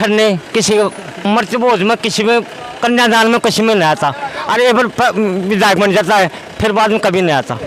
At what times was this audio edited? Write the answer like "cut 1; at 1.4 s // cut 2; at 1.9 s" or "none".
none